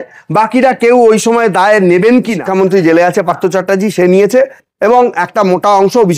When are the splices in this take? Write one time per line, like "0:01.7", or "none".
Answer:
0:02.4